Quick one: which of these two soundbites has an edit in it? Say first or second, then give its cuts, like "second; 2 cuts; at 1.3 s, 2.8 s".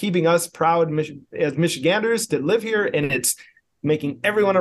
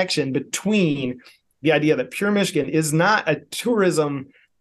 second; 1 cut; at 3.5 s